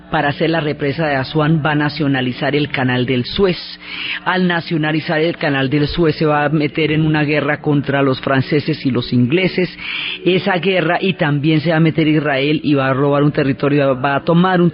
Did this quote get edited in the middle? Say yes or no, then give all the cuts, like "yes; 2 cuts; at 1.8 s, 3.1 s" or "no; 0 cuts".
yes; 1 cut; at 13.6 s